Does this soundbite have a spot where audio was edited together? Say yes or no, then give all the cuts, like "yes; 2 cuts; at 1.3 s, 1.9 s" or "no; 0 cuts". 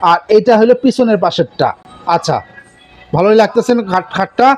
no; 0 cuts